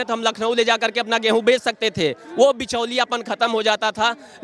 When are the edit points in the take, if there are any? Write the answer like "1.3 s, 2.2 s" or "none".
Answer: none